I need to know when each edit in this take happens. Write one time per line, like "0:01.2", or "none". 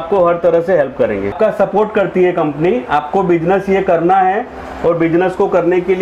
0:01.3

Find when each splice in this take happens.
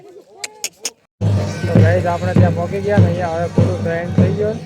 0:01.0

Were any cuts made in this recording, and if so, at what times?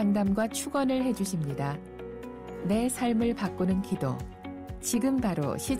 none

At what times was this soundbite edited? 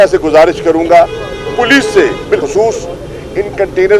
none

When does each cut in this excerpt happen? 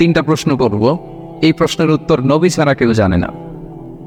none

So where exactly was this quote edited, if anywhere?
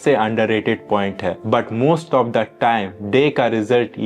none

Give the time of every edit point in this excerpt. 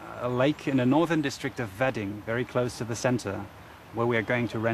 0:02.5

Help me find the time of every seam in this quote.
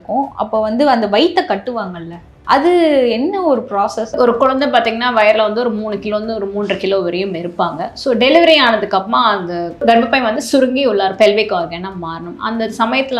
0:04.1
0:09.8

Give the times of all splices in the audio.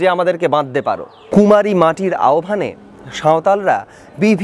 0:01.1

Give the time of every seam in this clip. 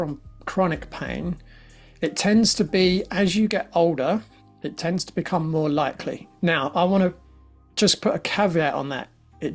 0:06.3

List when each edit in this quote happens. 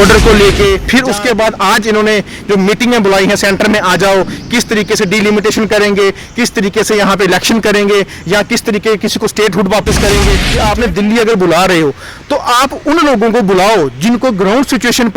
0:00.8
0:10.4

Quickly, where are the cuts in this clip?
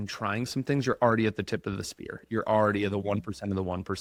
none

